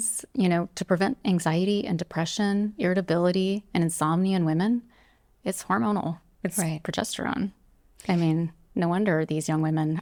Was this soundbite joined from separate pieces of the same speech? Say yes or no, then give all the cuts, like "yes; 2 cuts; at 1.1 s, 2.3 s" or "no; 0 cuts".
no; 0 cuts